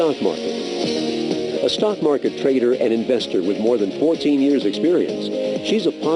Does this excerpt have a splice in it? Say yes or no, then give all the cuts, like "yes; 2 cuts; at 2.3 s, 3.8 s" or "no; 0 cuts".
yes; 1 cut; at 2.1 s